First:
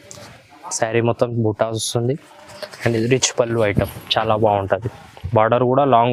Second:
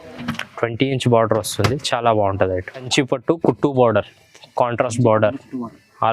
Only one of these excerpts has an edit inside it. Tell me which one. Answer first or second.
second